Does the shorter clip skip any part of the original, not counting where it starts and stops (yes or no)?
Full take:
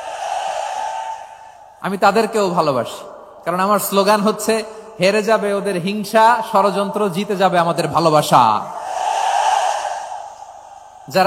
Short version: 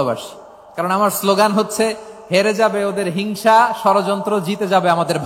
no